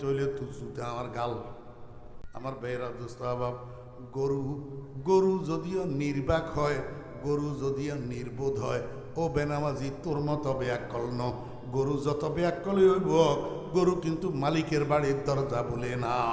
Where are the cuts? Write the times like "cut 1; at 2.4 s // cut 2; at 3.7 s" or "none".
cut 1; at 2.3 s